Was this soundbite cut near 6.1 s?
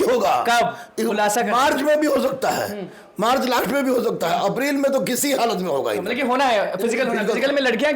no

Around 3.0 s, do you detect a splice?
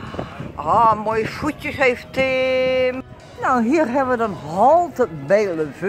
yes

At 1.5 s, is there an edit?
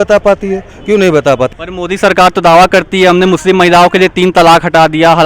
yes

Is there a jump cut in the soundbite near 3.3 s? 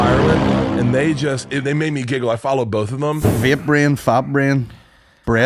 yes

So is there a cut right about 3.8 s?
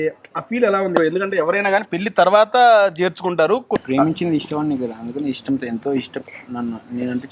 yes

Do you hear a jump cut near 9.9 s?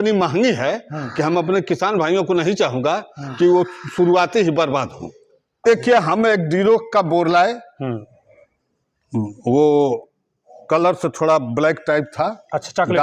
no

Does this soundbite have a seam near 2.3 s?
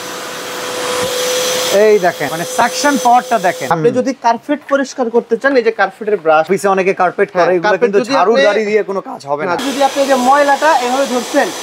yes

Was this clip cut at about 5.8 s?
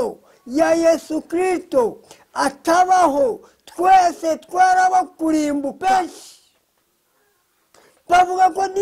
yes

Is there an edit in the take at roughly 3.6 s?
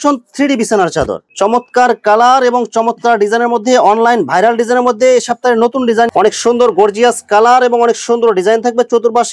no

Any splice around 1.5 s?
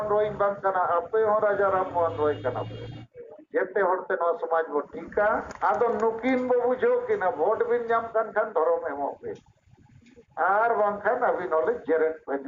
no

